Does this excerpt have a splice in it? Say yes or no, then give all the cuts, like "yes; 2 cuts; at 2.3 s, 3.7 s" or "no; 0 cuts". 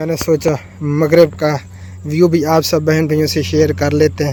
no; 0 cuts